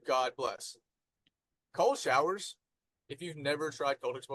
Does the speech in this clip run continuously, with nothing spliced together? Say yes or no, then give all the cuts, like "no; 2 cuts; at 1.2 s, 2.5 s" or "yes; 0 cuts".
yes; 0 cuts